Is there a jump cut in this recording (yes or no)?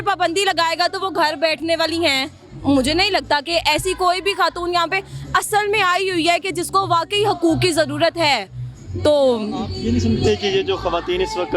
no